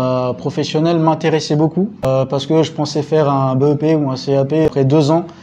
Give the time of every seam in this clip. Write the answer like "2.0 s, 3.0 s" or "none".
2.0 s, 4.7 s

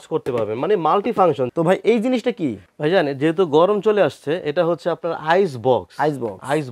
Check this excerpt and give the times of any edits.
1.5 s, 2.7 s

